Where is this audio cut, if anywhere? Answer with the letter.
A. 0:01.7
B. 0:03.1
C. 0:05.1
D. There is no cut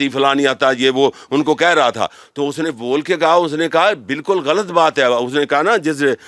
D